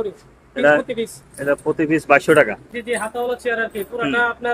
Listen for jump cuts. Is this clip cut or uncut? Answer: cut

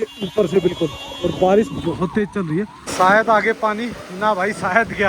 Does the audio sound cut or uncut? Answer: cut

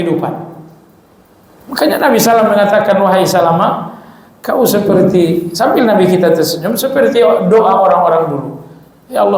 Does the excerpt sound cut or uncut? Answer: uncut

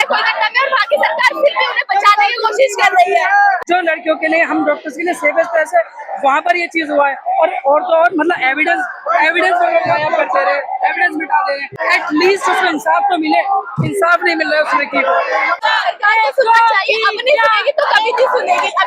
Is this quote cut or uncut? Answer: cut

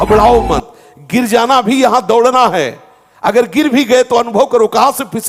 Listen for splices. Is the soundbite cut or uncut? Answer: uncut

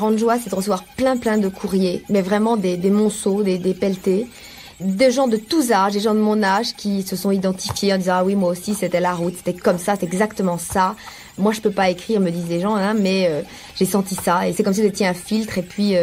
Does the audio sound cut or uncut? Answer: cut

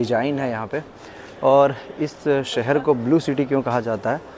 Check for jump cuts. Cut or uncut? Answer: uncut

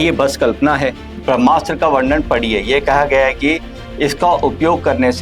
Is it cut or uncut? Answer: cut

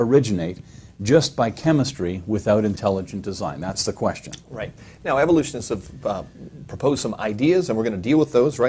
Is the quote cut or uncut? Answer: cut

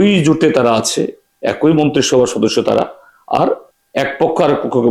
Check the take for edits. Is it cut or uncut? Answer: cut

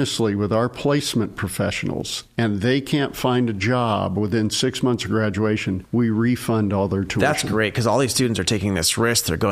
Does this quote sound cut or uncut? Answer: cut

